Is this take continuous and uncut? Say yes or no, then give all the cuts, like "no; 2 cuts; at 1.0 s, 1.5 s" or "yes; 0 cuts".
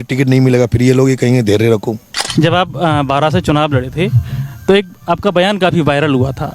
no; 1 cut; at 2.1 s